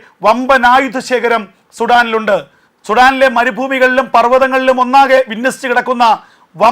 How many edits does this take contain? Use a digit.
1